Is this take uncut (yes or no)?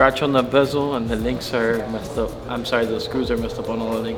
yes